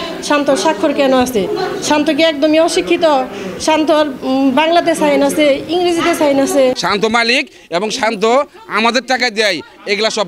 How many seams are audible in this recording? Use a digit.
1